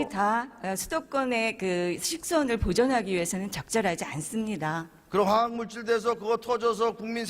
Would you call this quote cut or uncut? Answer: cut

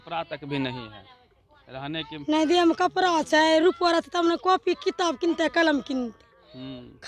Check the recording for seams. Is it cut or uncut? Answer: uncut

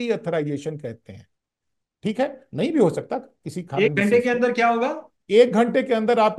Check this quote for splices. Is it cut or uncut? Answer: uncut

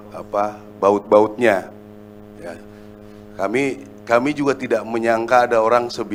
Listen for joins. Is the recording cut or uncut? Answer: uncut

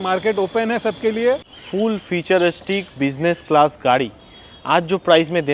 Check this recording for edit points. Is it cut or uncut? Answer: cut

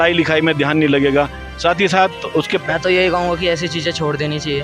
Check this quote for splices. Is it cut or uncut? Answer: cut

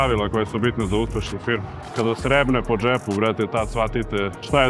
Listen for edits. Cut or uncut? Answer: cut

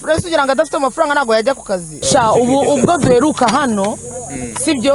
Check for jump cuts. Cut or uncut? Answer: cut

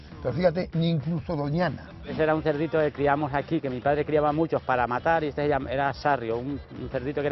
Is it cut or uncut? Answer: cut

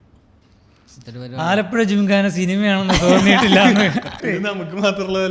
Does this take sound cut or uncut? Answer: cut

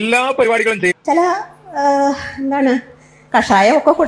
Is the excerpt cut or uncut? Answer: cut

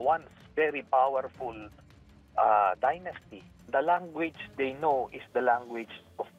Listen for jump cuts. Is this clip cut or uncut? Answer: cut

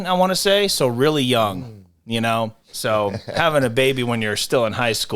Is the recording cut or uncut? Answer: cut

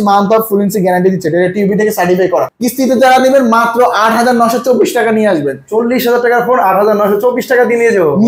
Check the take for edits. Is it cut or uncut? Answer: cut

